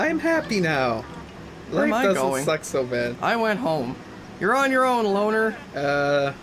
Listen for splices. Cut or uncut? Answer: uncut